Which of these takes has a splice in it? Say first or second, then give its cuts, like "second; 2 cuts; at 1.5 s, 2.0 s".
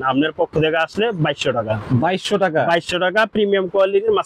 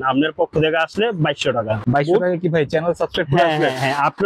second; 1 cut; at 1.8 s